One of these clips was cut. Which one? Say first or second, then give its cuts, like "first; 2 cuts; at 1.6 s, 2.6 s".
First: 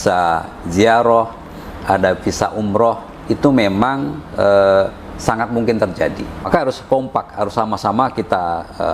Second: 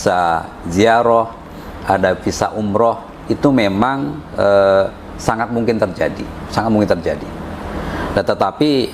first; 1 cut; at 6.5 s